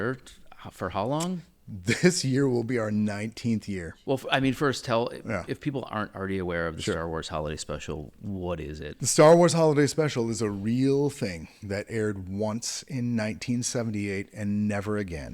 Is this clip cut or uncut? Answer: cut